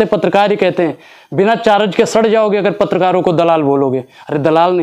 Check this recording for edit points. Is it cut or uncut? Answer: uncut